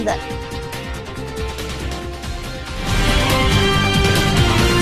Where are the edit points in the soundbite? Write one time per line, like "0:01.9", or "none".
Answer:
none